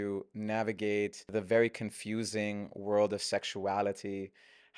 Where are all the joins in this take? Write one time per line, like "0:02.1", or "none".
0:01.3